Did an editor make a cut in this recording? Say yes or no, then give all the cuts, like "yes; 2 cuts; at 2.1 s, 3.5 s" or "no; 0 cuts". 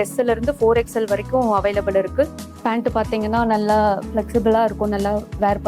yes; 1 cut; at 2.4 s